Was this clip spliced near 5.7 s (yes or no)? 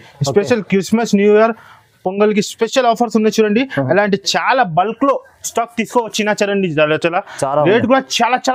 no